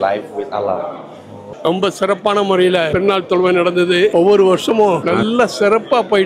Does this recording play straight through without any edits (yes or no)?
no